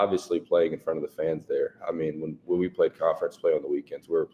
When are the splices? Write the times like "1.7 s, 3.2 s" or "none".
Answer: none